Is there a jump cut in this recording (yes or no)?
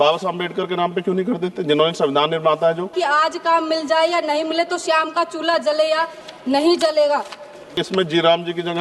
yes